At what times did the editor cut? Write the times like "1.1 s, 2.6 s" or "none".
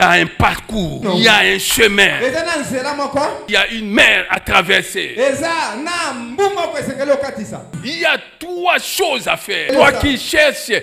1.0 s, 7.8 s, 9.7 s